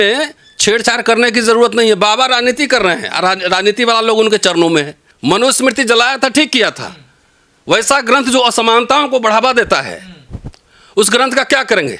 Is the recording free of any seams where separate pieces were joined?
no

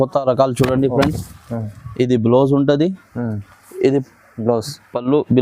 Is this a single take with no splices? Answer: yes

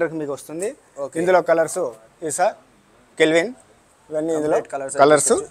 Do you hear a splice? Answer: no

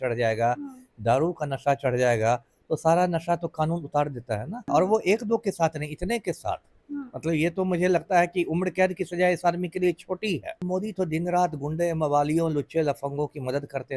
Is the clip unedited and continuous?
no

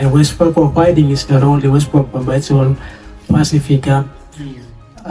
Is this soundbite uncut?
yes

